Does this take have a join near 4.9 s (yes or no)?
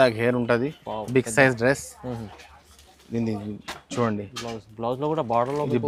no